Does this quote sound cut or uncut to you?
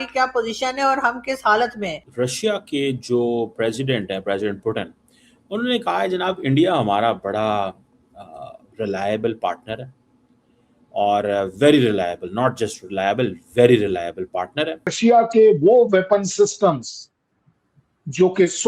cut